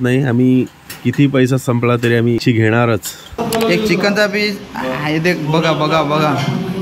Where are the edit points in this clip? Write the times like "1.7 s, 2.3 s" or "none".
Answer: 2.4 s, 3.4 s